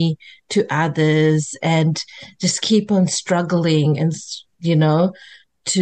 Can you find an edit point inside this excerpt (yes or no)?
no